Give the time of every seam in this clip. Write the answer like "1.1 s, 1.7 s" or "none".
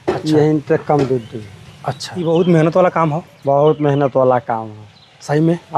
2.1 s